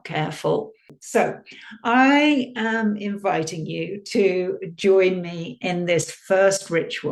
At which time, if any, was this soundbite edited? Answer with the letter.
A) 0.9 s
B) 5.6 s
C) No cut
A